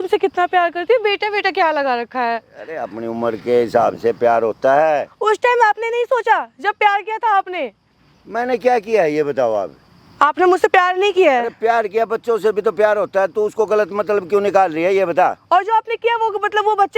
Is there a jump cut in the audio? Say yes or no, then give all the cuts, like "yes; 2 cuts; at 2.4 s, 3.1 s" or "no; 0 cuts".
no; 0 cuts